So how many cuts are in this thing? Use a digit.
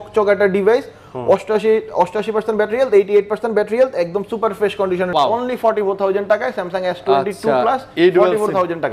1